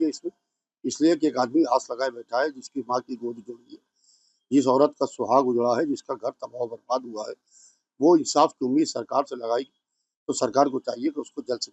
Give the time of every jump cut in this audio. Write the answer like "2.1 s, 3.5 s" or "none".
none